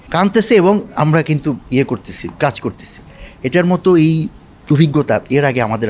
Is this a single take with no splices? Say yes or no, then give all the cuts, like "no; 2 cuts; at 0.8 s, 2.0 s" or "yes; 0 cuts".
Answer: yes; 0 cuts